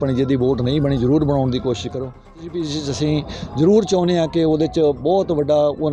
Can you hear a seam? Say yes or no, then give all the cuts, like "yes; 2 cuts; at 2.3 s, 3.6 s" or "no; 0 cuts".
yes; 1 cut; at 2.5 s